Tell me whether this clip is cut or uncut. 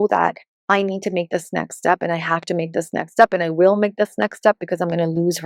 uncut